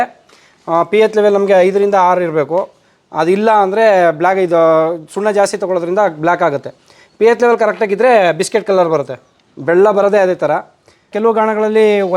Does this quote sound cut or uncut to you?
cut